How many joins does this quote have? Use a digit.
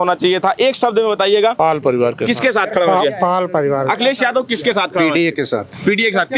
1